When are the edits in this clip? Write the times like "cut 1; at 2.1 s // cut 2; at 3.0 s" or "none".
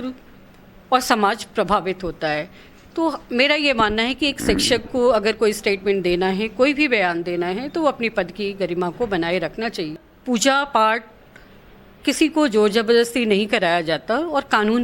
cut 1; at 10.1 s